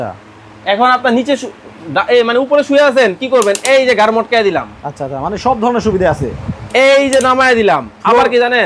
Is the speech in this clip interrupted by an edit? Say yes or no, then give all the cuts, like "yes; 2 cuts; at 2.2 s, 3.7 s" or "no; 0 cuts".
no; 0 cuts